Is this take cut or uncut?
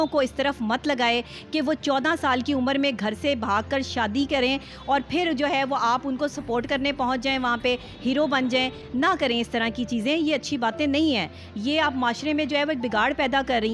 uncut